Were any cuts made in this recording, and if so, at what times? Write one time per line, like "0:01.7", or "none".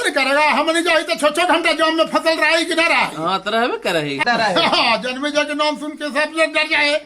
0:04.2

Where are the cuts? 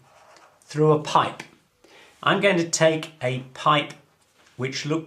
0:03.0

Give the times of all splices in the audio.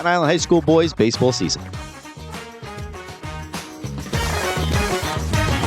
0:01.5

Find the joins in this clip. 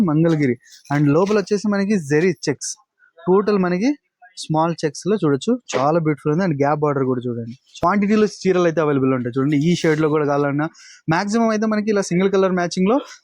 0:07.7

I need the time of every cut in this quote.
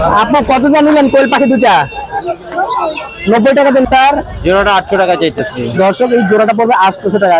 0:03.8

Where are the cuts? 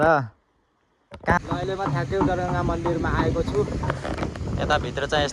0:01.4

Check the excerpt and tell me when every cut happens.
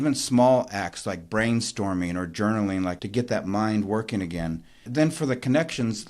0:03.0
0:04.9

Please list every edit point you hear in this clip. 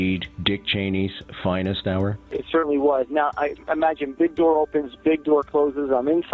none

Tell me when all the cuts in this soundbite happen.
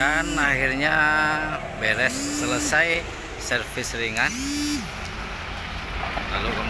none

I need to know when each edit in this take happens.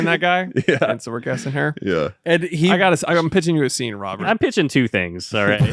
0:04.2

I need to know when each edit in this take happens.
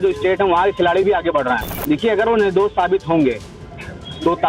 0:01.7

